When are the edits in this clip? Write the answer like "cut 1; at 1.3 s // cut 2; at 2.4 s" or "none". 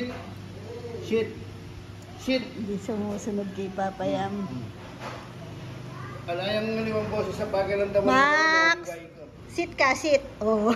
none